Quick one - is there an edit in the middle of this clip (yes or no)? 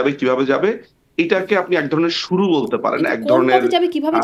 no